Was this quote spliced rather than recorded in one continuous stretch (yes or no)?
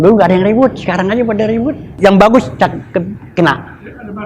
yes